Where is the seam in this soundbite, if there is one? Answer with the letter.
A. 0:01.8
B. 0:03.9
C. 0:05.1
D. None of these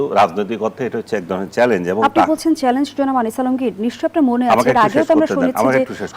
D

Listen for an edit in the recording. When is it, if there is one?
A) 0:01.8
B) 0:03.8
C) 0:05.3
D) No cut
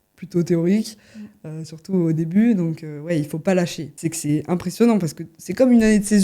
B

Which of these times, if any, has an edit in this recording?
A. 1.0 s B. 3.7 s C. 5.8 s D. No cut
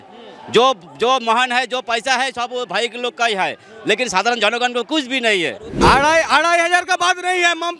C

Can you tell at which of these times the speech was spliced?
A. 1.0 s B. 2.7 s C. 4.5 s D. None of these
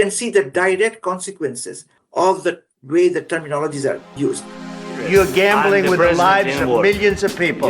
C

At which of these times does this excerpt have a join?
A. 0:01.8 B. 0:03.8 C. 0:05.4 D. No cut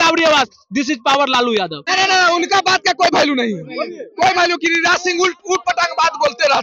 A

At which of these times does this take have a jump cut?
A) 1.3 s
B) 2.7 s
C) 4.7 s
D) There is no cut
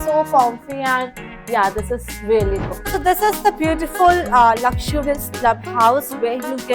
B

